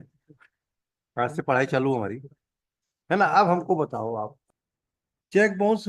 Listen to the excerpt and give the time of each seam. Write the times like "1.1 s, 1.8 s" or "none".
4.4 s